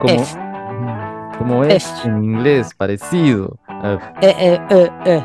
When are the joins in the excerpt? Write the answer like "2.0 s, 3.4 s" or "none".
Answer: 4.0 s

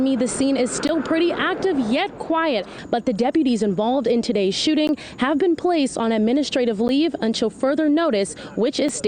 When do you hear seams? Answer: 2.8 s

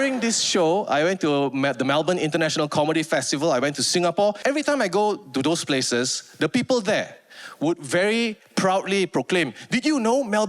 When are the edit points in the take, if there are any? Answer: 4.4 s

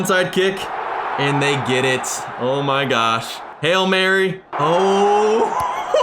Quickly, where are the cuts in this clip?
4.5 s

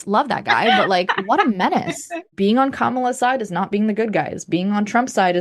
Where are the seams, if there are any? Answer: 2.1 s

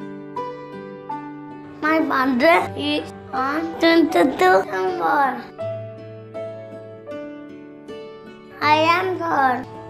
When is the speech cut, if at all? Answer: 1.8 s, 5.4 s, 8.6 s

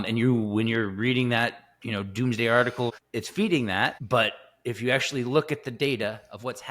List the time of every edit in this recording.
2.9 s, 4.0 s

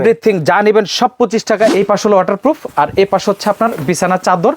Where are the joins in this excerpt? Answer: 1.7 s

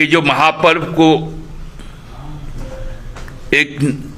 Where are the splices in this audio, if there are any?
none

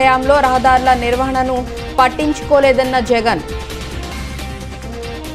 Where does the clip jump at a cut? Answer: 3.4 s

